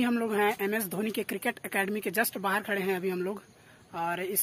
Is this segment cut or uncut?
uncut